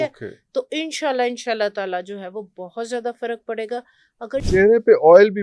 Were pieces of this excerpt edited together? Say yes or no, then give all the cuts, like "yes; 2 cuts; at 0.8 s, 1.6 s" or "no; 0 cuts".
yes; 1 cut; at 4.5 s